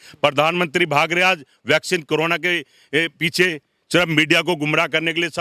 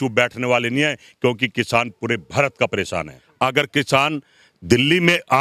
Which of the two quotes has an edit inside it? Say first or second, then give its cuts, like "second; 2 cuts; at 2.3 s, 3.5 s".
second; 1 cut; at 3.2 s